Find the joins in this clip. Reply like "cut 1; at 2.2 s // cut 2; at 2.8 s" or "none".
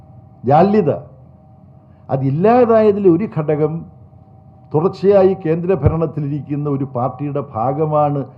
none